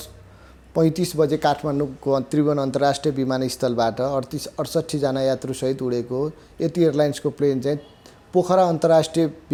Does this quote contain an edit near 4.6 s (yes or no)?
no